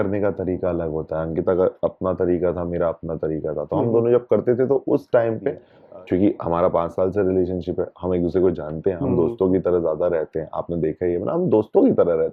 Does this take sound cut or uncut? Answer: cut